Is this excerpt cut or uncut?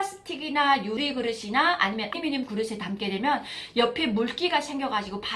cut